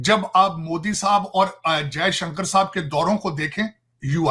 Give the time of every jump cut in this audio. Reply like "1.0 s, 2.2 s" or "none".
none